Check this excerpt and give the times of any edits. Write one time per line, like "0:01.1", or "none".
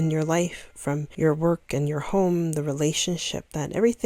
0:01.1